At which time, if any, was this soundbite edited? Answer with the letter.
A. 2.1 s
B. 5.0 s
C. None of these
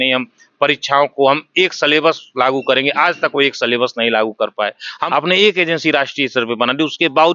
B